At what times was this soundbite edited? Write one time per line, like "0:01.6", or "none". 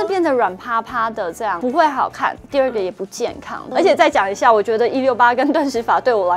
0:01.6
0:03.7